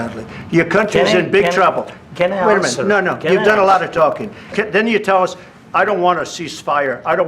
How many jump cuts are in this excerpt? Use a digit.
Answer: 1